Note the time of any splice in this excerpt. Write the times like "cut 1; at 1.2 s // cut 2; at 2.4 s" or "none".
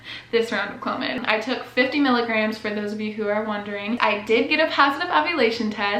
cut 1; at 4.0 s